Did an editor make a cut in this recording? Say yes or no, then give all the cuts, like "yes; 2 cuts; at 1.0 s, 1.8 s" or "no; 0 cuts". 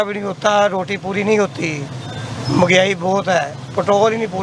no; 0 cuts